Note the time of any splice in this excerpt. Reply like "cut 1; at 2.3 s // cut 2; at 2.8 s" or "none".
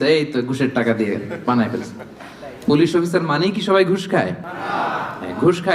none